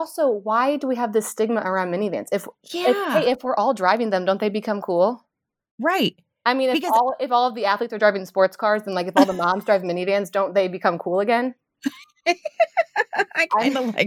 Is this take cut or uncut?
uncut